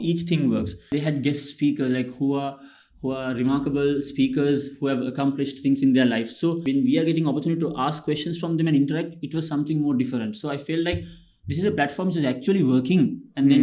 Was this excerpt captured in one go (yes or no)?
no